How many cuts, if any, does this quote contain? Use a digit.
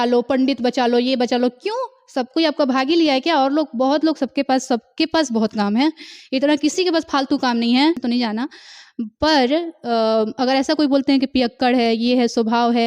1